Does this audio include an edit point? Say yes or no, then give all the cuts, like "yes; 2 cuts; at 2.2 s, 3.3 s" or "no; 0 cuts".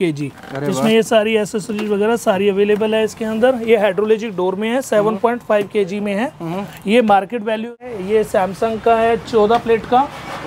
yes; 1 cut; at 7.9 s